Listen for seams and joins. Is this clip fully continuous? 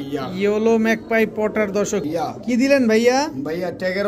no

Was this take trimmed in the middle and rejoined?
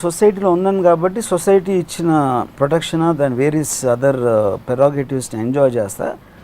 yes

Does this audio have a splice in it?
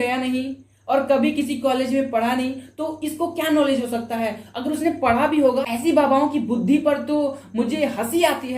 yes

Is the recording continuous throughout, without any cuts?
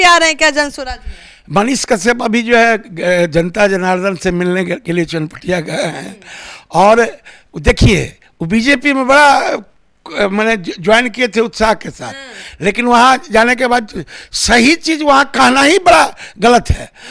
yes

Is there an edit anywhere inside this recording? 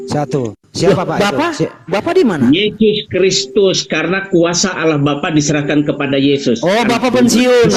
no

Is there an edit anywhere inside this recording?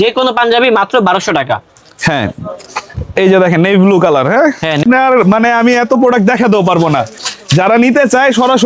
yes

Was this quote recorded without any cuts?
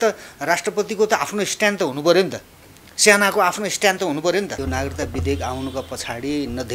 no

